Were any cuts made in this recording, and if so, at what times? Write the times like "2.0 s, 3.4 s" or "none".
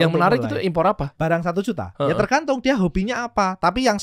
1.1 s